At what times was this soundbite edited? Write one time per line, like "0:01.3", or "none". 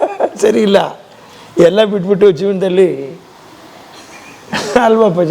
none